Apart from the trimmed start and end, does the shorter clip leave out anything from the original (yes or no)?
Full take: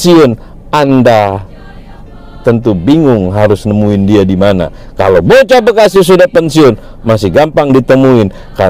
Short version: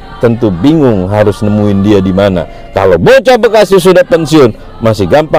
no